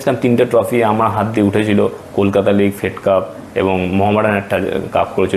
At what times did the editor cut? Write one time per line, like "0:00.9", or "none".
none